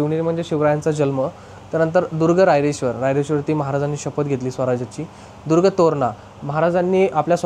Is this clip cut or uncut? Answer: uncut